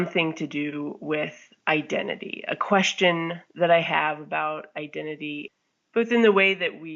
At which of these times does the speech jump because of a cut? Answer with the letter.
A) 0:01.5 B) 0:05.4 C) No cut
B